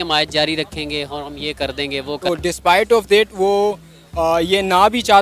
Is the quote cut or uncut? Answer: cut